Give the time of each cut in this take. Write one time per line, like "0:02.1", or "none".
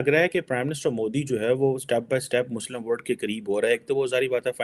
none